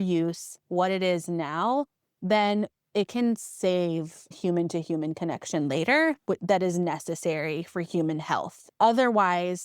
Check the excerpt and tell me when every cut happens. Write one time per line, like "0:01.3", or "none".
0:02.8
0:04.3
0:08.7